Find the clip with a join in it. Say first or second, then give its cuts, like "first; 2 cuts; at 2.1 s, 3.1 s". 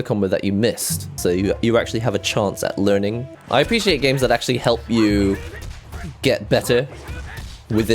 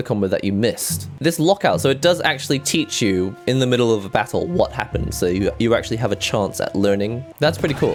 first; 2 cuts; at 1.0 s, 3.3 s